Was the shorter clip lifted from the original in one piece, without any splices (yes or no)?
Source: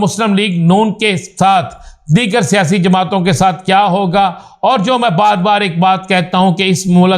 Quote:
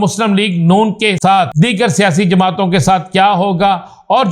no